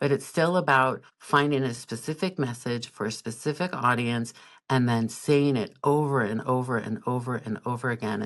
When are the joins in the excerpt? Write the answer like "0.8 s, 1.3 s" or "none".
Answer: 1.1 s